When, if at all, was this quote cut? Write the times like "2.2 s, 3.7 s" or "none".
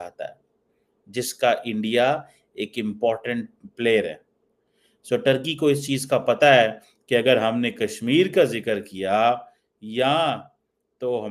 none